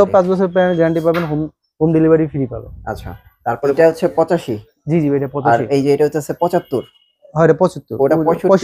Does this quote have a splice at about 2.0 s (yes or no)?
no